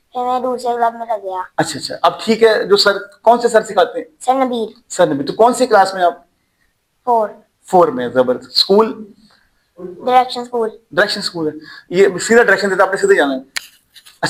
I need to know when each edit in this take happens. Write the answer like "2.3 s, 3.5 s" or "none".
none